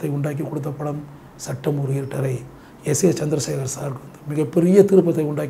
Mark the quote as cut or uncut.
uncut